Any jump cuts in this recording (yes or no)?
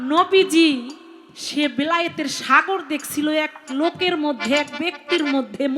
no